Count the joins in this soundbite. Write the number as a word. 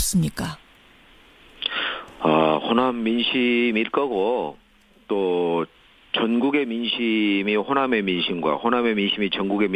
one